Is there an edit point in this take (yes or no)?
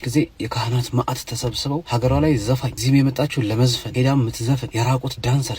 yes